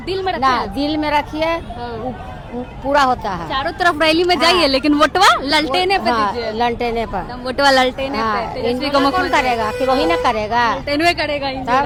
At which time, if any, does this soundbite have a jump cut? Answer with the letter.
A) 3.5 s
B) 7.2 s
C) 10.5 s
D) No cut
D